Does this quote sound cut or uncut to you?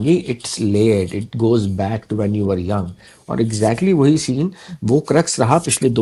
uncut